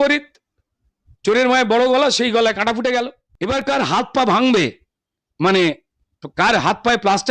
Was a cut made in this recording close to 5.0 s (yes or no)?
no